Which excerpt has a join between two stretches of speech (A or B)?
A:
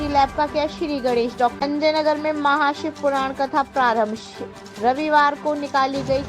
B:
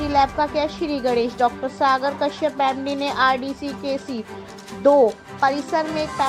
A